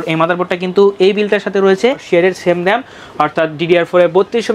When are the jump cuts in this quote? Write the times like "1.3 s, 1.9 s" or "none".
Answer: 2.0 s